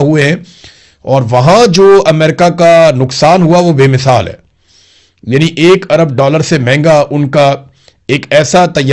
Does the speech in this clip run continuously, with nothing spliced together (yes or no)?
yes